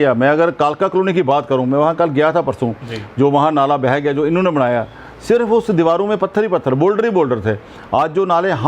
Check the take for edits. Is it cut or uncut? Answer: uncut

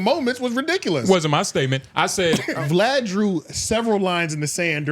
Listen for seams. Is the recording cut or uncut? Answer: cut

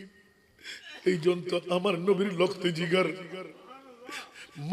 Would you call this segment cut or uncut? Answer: uncut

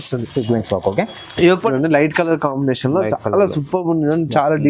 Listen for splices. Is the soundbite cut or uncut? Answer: cut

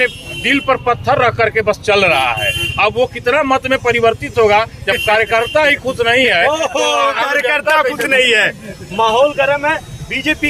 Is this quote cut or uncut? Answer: uncut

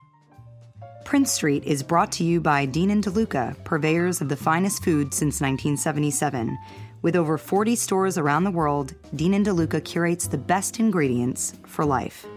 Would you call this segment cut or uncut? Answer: uncut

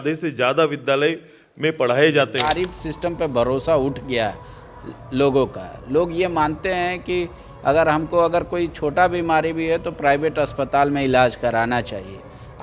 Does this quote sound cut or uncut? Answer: cut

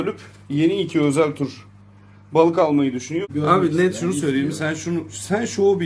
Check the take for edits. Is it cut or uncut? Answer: cut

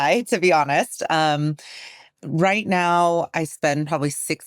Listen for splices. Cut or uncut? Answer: uncut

